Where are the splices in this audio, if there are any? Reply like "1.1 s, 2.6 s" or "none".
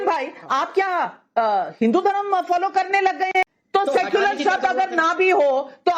3.4 s